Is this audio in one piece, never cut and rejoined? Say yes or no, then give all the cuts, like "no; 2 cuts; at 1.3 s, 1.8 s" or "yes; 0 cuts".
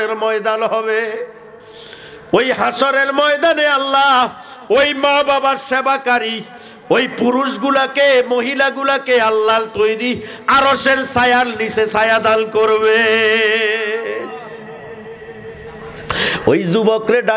yes; 0 cuts